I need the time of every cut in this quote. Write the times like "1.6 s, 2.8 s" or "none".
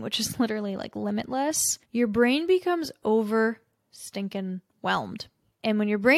none